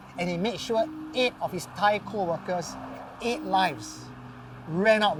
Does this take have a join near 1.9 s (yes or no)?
no